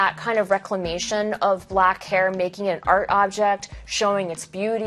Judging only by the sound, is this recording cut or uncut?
uncut